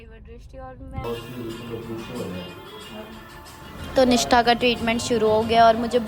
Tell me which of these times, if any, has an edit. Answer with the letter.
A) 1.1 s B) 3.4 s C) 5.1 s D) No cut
A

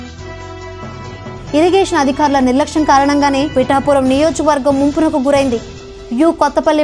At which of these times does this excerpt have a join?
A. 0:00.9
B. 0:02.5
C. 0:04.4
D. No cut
A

